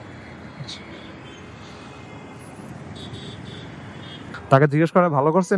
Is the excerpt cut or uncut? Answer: uncut